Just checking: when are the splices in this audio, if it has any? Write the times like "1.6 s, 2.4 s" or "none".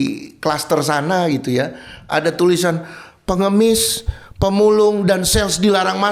none